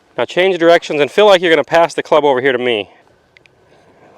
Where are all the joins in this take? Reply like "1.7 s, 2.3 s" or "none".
3.0 s